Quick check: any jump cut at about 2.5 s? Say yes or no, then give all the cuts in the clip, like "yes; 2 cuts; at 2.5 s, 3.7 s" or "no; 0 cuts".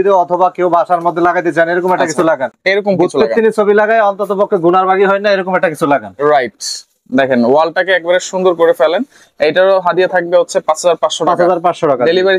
no; 0 cuts